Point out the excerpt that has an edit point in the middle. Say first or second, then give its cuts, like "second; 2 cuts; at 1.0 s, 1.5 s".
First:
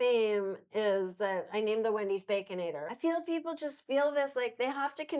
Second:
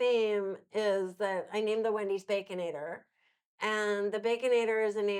first; 1 cut; at 2.9 s